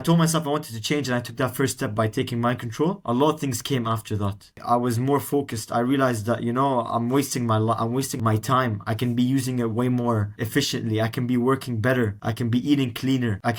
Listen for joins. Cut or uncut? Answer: uncut